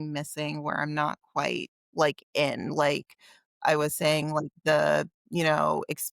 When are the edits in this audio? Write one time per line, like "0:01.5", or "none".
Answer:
0:01.8